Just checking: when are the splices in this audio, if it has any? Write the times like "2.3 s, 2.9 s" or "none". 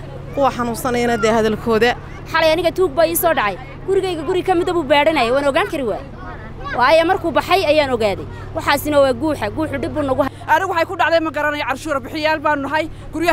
2.2 s, 10.3 s